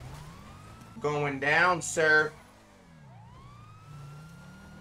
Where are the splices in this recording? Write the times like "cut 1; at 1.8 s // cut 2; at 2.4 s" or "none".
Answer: cut 1; at 1.0 s